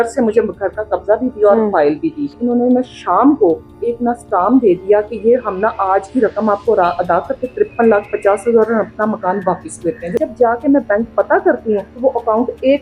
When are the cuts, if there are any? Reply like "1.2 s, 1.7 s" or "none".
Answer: 2.3 s, 3.7 s, 10.2 s, 11.9 s